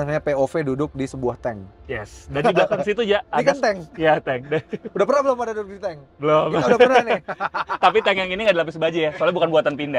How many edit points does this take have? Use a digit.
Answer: 0